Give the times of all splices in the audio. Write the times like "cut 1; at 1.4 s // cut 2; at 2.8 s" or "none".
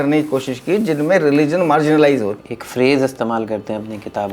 cut 1; at 2.3 s